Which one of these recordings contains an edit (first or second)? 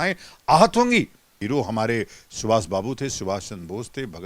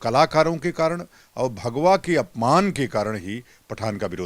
first